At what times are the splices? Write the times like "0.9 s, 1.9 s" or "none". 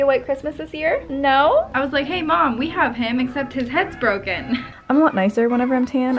1.7 s, 4.7 s